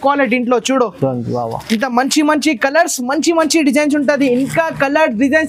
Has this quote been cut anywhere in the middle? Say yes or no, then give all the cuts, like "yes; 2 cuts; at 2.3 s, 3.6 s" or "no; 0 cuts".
no; 0 cuts